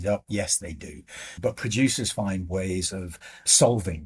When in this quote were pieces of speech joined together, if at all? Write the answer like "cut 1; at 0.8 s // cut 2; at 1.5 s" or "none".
cut 1; at 1.4 s